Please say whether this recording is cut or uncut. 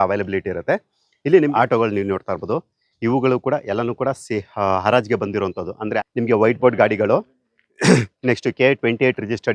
cut